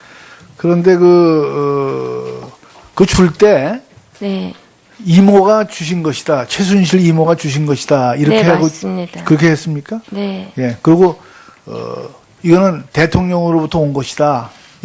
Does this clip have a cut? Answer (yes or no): yes